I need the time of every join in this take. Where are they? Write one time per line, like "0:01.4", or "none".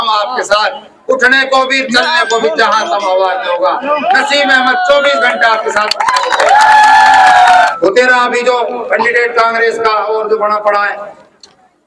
0:07.7